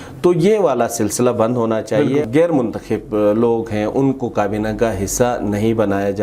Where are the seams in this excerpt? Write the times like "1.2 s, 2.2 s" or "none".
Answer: 2.3 s